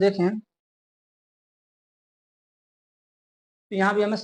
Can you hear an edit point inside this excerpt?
no; 0 cuts

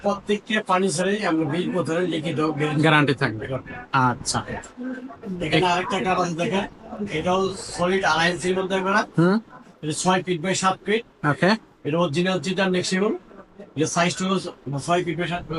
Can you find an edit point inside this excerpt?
no; 0 cuts

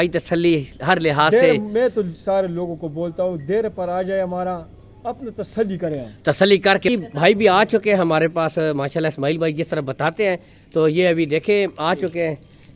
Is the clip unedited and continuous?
no; 1 cut; at 6.9 s

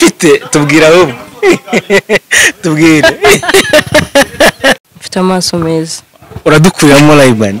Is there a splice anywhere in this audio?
yes; 1 cut; at 4.8 s

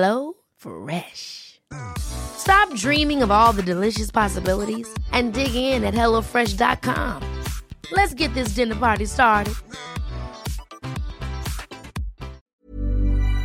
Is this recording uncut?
no; 1 cut; at 12.4 s

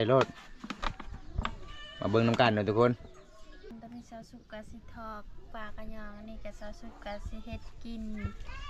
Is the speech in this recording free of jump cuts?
no; 1 cut; at 3.7 s

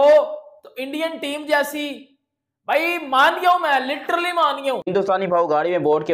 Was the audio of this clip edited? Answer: yes; 1 cut; at 4.8 s

